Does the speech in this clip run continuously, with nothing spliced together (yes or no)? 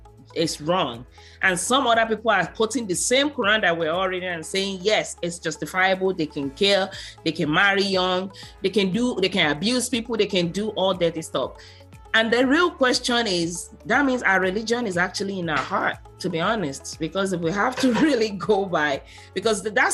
yes